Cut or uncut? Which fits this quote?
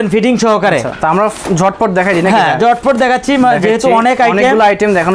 uncut